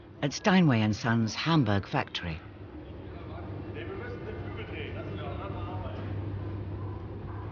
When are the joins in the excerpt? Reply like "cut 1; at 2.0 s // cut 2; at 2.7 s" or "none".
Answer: none